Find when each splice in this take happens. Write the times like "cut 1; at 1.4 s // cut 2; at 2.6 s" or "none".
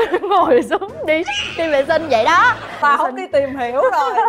cut 1; at 2.8 s